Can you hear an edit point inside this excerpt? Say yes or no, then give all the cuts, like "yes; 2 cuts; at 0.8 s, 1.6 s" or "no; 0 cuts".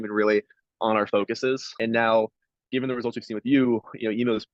yes; 1 cut; at 1.7 s